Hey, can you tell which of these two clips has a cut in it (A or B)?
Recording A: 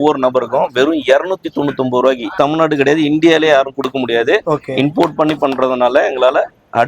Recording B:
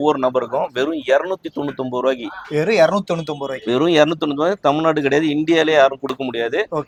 A